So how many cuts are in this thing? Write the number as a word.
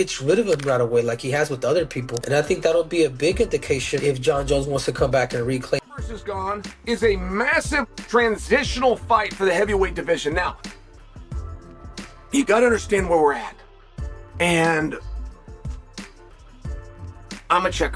one